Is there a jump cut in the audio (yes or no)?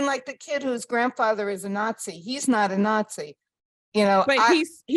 no